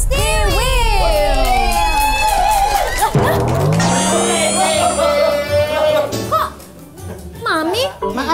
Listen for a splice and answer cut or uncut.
uncut